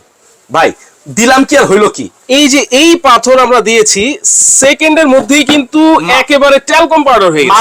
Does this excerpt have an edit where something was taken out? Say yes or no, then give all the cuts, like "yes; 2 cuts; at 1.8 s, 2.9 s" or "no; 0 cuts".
no; 0 cuts